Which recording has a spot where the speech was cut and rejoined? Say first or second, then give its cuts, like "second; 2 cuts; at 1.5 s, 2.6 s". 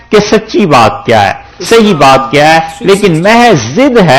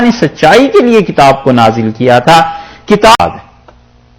second; 1 cut; at 3.2 s